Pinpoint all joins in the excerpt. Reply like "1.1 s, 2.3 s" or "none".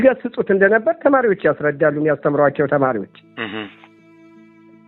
none